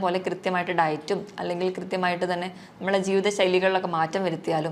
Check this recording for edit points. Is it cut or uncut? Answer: uncut